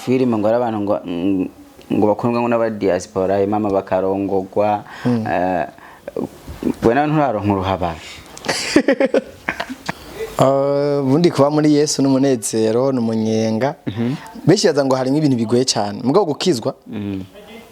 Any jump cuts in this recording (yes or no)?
yes